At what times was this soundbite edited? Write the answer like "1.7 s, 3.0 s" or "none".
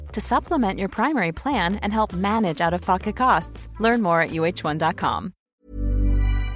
5.4 s